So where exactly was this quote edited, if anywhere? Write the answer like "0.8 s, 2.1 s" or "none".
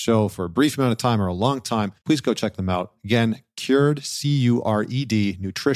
1.9 s